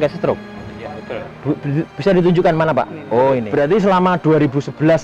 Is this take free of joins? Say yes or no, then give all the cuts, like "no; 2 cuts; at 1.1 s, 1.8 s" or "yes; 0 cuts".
no; 1 cut; at 3.5 s